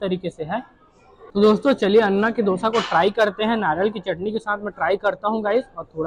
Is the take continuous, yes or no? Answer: no